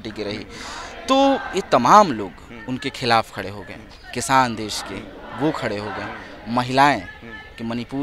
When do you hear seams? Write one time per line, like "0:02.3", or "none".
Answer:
none